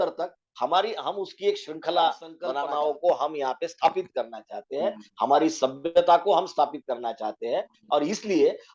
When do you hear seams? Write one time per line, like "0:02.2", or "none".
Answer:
0:02.5